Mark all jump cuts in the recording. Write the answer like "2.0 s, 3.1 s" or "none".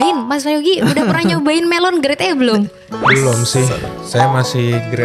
none